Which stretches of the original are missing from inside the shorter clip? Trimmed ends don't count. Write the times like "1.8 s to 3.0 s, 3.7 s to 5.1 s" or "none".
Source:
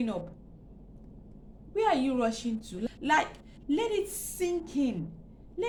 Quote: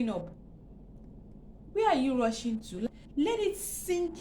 2.9 s to 3.4 s